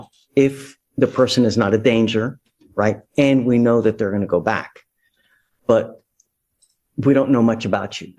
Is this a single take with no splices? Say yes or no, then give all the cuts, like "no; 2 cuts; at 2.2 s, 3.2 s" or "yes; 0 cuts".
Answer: yes; 0 cuts